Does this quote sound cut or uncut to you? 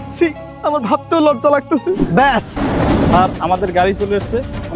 cut